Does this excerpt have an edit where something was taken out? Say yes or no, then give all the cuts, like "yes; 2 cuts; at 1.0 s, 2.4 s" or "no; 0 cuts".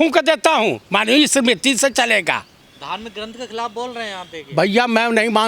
yes; 1 cut; at 2.7 s